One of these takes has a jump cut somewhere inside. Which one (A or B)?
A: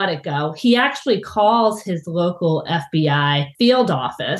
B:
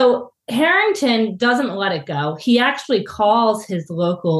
A